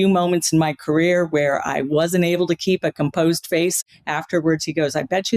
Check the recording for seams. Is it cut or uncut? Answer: cut